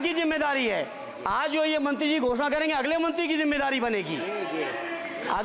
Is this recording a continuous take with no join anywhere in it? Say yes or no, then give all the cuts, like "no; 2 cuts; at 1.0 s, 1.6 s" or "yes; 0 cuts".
yes; 0 cuts